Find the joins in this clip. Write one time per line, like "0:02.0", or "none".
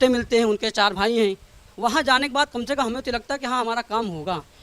none